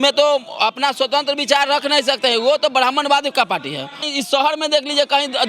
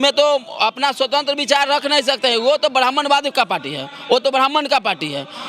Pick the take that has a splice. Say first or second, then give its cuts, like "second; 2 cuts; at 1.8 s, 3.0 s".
first; 1 cut; at 4.0 s